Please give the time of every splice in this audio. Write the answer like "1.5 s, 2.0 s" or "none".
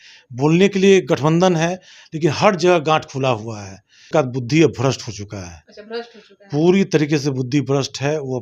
4.0 s